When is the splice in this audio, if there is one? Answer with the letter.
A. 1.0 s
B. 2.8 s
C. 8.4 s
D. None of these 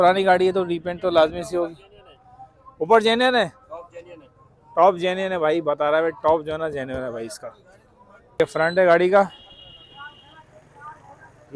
C